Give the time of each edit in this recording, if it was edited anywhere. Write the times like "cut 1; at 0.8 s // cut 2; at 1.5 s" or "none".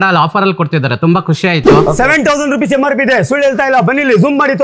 cut 1; at 1.8 s